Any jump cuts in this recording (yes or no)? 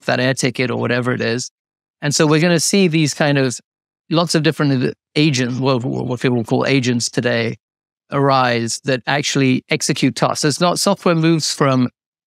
no